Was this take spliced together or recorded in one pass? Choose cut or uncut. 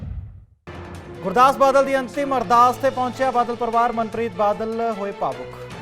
cut